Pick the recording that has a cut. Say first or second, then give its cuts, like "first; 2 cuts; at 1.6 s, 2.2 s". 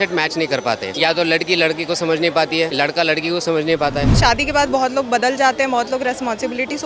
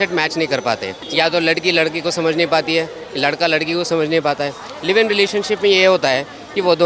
first; 3 cuts; at 0.9 s, 2.7 s, 4.1 s